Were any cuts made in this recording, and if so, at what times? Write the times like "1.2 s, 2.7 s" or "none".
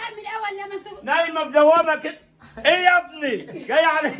none